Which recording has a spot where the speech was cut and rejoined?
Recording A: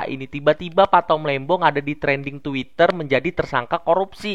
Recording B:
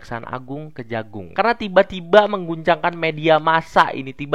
B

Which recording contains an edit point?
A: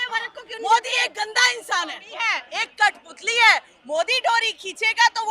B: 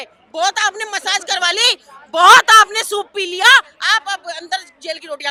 A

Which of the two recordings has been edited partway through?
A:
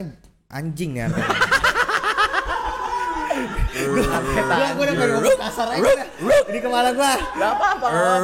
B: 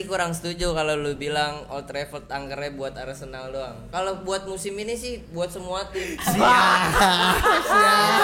B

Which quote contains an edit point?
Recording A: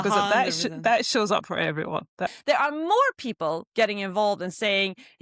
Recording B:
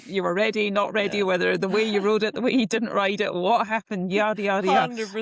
A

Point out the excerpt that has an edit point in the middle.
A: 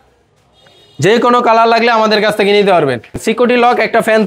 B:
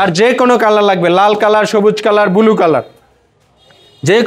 A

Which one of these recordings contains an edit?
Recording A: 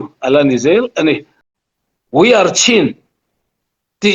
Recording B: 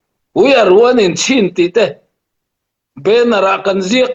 A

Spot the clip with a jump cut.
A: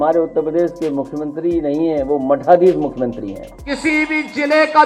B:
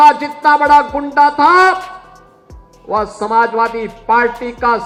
A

